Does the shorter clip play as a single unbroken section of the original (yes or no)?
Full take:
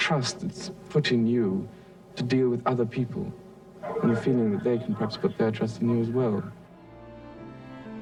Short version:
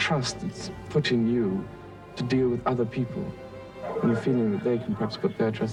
yes